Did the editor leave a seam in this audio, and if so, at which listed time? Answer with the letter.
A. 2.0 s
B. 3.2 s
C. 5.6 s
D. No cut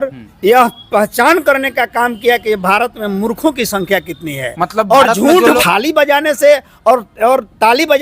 C